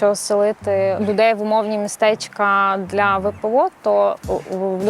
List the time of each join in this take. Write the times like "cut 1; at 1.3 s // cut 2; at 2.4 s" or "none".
cut 1; at 1.0 s